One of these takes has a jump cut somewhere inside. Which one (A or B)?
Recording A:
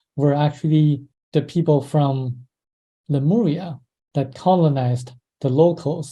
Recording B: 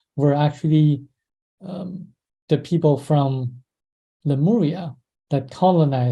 A